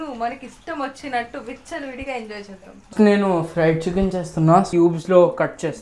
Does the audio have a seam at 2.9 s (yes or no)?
yes